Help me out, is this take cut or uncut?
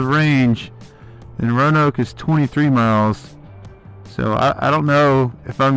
uncut